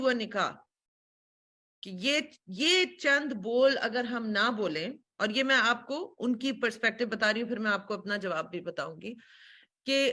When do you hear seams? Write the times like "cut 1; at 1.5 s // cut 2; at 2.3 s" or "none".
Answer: none

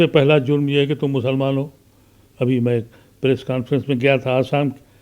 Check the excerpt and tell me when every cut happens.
none

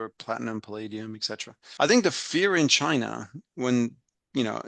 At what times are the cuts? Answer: cut 1; at 1.6 s

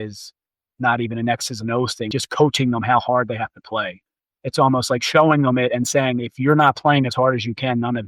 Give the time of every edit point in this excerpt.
cut 1; at 2.1 s // cut 2; at 4.0 s

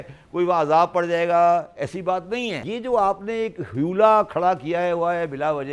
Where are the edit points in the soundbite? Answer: cut 1; at 2.6 s

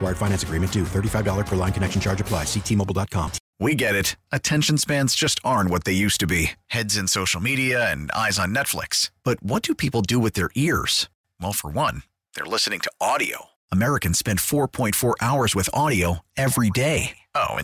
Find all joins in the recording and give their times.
cut 1; at 3.4 s

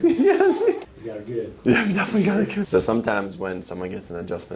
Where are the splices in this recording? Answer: cut 1; at 0.9 s // cut 2; at 2.7 s

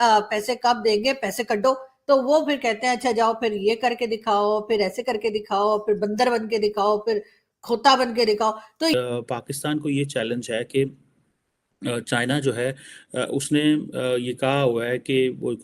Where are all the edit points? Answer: cut 1; at 8.9 s

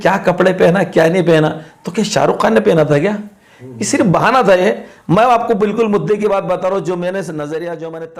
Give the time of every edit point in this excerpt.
none

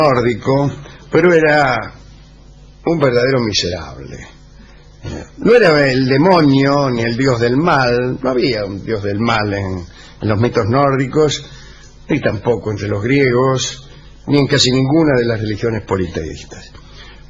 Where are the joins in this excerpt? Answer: cut 1; at 13.7 s

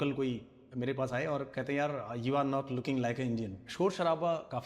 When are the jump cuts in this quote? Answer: cut 1; at 3.6 s

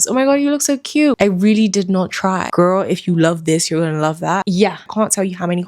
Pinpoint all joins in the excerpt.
cut 1; at 1.2 s // cut 2; at 2.5 s // cut 3; at 4.8 s

